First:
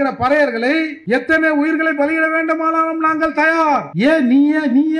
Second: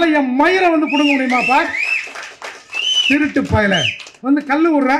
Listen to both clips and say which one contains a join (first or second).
first